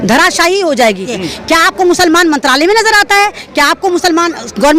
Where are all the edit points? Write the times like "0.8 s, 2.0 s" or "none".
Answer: 1.2 s